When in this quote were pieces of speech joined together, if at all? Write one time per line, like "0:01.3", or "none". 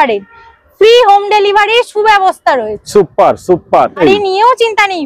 0:04.0